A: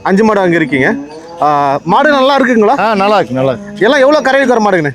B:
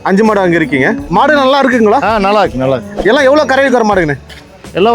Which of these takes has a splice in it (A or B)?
B